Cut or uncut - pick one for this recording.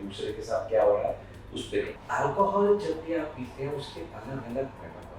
cut